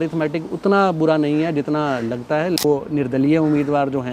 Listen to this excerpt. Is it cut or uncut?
cut